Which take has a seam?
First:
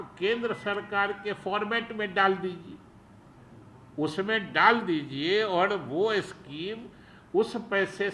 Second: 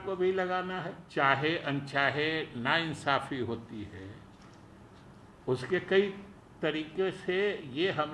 second; 1 cut; at 1.0 s

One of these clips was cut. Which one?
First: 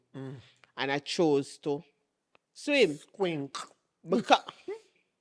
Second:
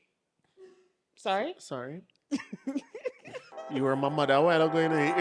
second; 1 cut; at 2.1 s

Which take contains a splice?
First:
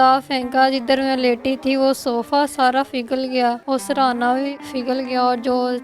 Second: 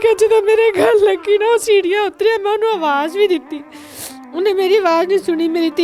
first; 1 cut; at 4.5 s

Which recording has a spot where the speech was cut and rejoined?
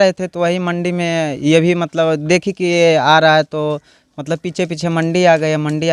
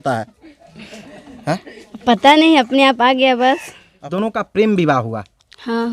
second; 1 cut; at 4.1 s

